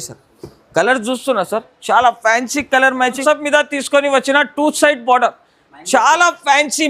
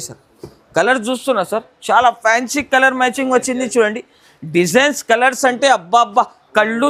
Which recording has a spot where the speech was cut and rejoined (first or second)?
first